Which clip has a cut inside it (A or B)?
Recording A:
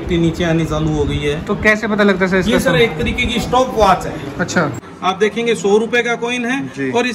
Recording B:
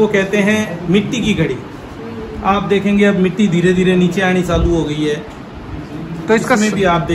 A